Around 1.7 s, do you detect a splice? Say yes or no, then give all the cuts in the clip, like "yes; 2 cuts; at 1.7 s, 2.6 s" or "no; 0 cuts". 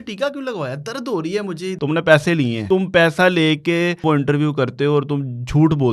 yes; 3 cuts; at 1.7 s, 2.6 s, 4.0 s